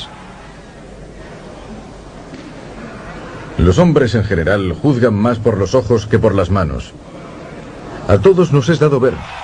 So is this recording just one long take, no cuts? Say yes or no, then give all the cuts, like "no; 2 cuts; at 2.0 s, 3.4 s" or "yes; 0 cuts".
no; 1 cut; at 5.1 s